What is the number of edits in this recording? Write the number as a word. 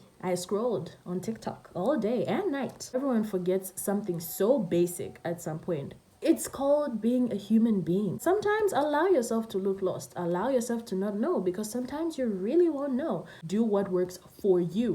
three